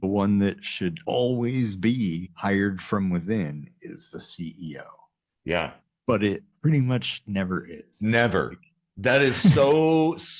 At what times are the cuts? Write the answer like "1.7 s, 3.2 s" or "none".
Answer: 1.0 s, 2.3 s

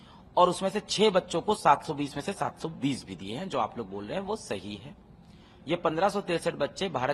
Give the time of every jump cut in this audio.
none

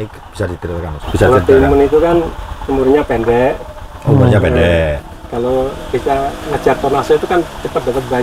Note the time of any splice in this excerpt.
1.0 s

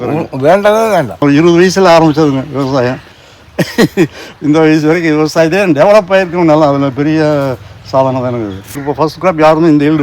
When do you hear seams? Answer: 1.2 s, 8.8 s

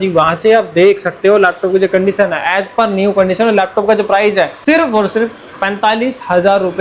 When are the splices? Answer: 4.6 s

